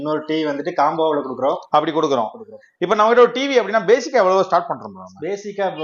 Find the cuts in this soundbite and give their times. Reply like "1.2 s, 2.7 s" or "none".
none